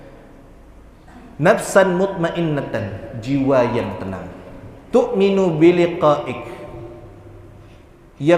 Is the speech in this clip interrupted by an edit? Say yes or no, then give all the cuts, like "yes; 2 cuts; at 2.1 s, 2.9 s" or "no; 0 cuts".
no; 0 cuts